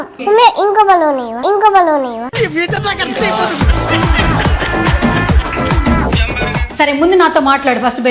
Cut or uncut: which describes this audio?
cut